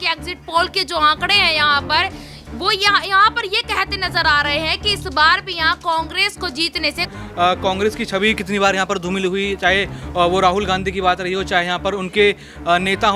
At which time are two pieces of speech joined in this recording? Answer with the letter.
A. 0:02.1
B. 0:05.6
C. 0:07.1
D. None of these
C